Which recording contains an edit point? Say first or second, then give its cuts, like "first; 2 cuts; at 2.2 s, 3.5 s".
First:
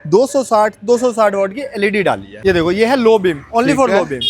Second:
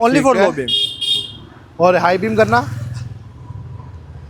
first; 1 cut; at 2.3 s